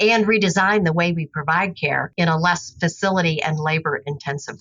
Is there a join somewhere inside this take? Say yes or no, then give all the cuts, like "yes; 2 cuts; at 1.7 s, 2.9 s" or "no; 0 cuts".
no; 0 cuts